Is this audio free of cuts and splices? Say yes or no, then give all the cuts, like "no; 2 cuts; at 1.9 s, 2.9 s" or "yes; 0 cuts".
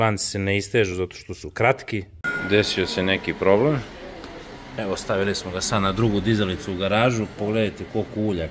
no; 1 cut; at 2.2 s